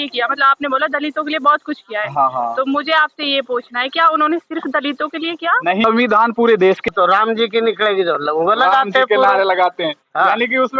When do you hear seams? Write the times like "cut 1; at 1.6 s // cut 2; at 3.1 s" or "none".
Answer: cut 1; at 6.8 s

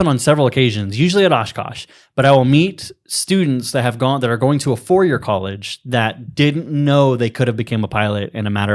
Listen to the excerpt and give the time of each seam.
none

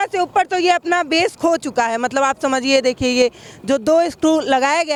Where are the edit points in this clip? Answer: none

